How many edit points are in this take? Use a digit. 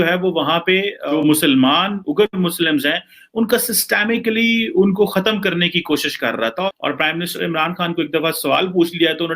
2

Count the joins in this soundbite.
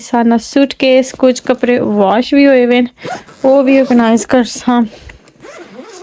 0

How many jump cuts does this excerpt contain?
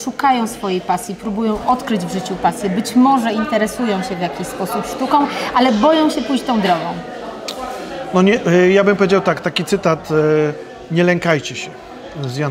0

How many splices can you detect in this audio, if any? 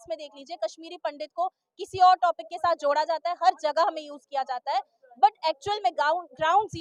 0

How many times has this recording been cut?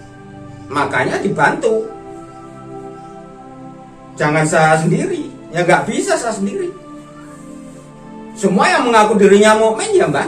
4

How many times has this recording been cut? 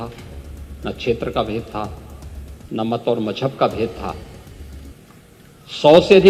0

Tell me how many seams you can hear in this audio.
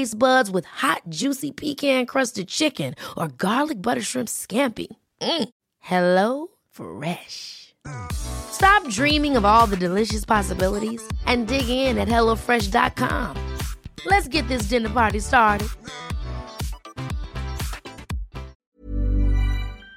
1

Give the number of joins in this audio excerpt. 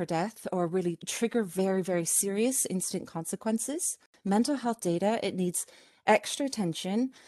2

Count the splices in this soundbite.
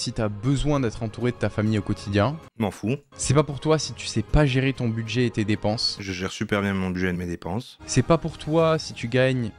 2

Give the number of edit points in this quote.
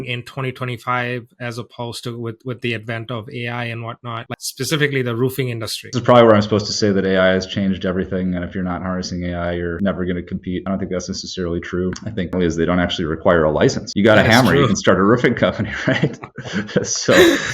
2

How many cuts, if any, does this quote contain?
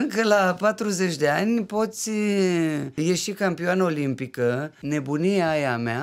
2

